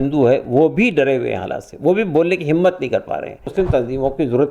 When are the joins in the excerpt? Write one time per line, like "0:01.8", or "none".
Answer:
0:03.5